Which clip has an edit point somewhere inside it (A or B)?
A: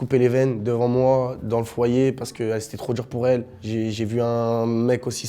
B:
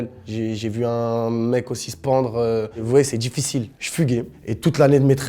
B